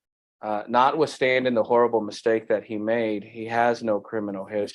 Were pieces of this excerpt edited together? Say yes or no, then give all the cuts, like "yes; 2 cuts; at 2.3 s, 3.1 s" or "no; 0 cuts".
no; 0 cuts